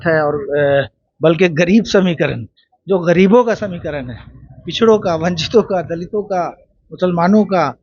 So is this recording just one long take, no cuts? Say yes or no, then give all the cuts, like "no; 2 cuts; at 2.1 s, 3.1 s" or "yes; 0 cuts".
yes; 0 cuts